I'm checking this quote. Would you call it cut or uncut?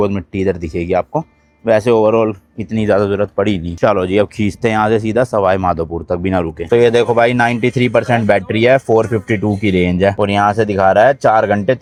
uncut